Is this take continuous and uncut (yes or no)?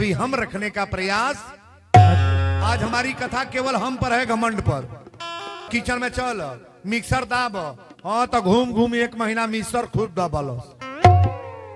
no